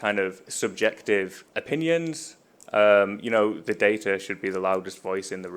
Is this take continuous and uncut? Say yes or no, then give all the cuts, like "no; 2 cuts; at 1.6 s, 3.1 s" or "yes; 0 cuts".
no; 1 cut; at 1.5 s